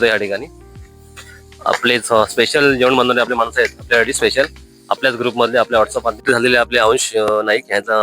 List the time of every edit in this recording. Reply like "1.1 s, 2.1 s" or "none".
6.2 s